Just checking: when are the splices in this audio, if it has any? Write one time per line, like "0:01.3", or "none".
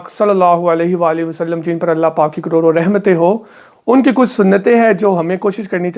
none